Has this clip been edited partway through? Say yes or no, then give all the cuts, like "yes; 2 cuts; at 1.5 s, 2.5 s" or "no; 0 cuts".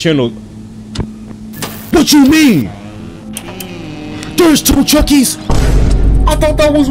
no; 0 cuts